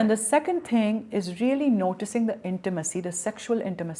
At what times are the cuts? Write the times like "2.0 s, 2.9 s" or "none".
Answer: none